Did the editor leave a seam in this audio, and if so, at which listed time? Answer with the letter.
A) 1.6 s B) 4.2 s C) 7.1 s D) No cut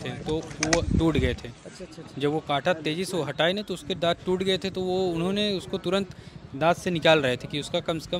D